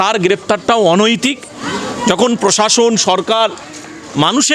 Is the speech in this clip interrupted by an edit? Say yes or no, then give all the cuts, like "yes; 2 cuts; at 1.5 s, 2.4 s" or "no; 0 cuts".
yes; 1 cut; at 1.6 s